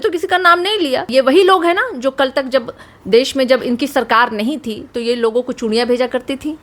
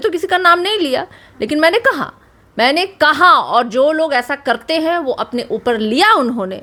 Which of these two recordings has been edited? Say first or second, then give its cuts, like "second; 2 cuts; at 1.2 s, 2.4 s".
first; 1 cut; at 1.1 s